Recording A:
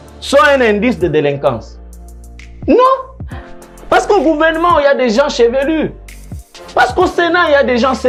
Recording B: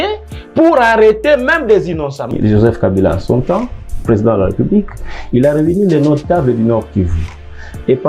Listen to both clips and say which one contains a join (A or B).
B